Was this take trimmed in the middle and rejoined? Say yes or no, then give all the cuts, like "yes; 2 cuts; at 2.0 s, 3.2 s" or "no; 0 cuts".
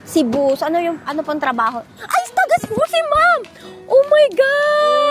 no; 0 cuts